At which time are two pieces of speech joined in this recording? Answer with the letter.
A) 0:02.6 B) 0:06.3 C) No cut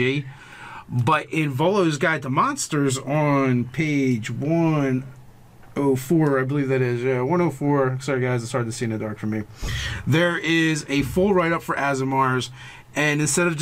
A